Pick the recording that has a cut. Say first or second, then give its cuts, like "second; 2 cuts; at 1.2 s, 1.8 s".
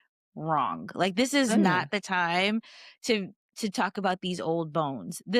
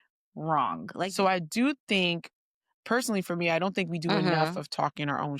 second; 1 cut; at 1.0 s